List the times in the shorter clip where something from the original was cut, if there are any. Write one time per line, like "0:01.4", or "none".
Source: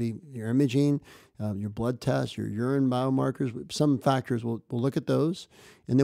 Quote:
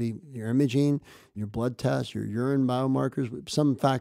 0:01.3